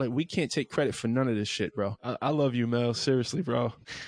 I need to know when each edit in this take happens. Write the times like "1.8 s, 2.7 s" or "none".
2.0 s